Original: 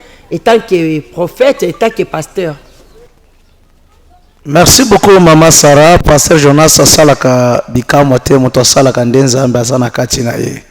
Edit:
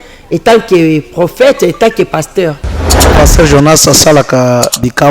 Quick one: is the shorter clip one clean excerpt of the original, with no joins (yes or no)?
no